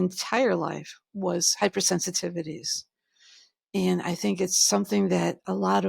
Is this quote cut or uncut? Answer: uncut